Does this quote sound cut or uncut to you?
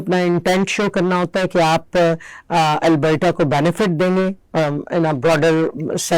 uncut